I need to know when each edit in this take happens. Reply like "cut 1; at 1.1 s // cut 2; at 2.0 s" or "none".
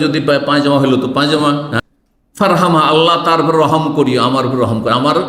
cut 1; at 1.7 s